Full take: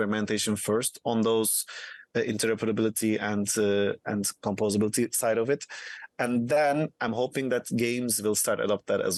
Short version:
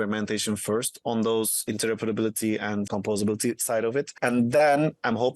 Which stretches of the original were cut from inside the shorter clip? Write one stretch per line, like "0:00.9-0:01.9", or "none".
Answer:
0:01.7-0:02.3
0:03.5-0:04.4
0:05.7-0:06.1